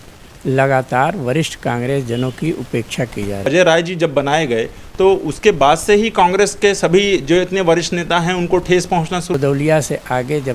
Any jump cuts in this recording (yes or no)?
yes